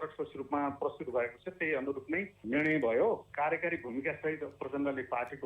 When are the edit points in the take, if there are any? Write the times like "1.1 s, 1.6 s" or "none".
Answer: 3.3 s